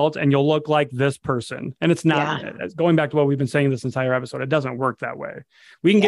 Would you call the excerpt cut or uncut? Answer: uncut